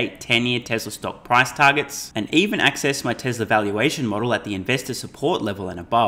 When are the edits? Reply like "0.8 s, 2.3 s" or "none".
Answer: none